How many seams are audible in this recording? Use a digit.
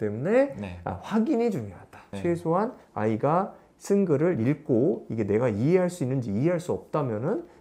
1